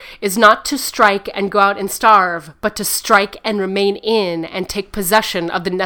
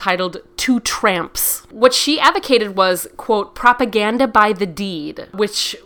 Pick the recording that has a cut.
second; 1 cut; at 1.6 s

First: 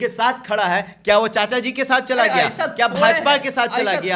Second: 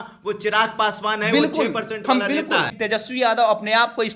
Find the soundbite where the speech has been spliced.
second; 1 cut; at 2.7 s

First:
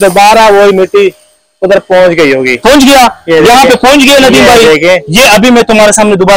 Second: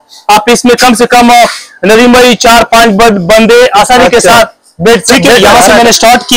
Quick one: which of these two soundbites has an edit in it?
second; 1 cut; at 5.4 s

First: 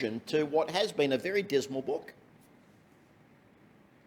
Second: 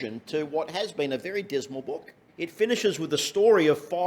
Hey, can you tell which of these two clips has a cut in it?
second; 1 cut; at 2.2 s

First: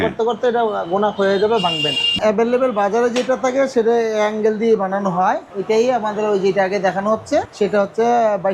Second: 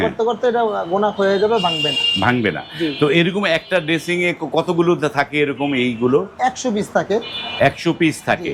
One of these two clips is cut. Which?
first; 3 cuts; at 2.2 s, 5.5 s, 7.5 s

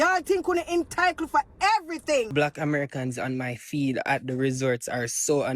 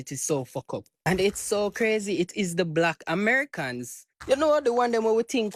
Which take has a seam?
first; 1 cut; at 2.3 s

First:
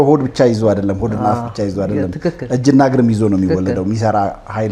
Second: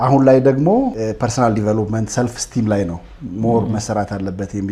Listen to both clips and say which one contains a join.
second; 1 cut; at 1.0 s

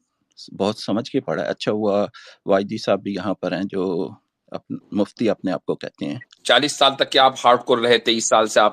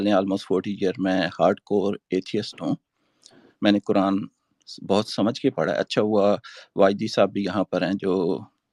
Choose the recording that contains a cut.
first; 1 cut; at 6.3 s

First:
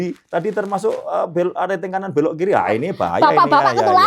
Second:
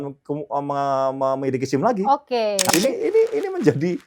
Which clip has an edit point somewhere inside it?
second; 1 cut; at 2.7 s

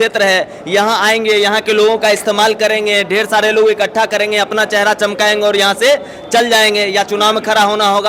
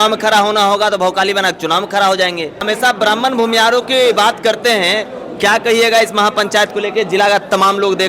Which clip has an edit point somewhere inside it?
second; 1 cut; at 2.6 s

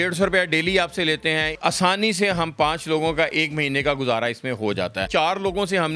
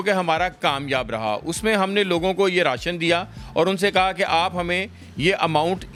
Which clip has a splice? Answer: first; 2 cuts; at 1.6 s, 5.0 s

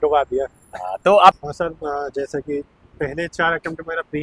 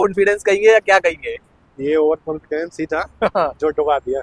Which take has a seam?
first; 1 cut; at 1.5 s

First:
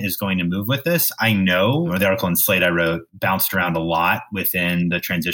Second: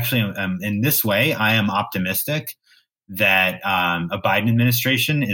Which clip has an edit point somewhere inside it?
first; 1 cut; at 1.9 s

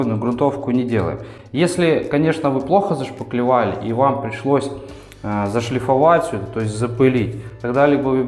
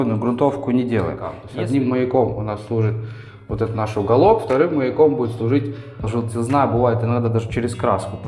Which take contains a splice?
second; 2 cuts; at 1.4 s, 6.0 s

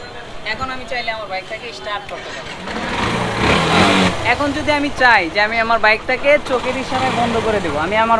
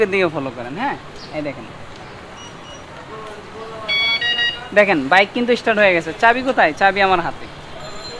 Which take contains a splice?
first; 1 cut; at 4.0 s

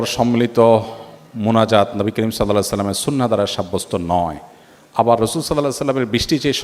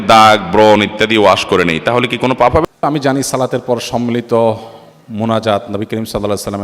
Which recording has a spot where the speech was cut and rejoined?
second; 1 cut; at 2.7 s

